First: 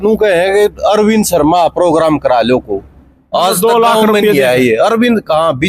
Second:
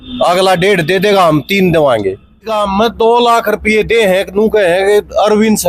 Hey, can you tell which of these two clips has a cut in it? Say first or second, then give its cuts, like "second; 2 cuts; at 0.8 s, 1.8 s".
second; 1 cut; at 2.5 s